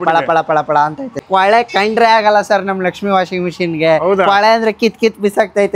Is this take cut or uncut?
cut